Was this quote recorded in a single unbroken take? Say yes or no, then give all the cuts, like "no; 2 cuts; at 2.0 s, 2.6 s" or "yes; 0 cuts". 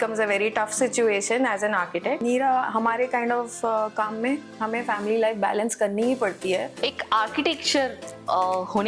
no; 2 cuts; at 2.2 s, 6.7 s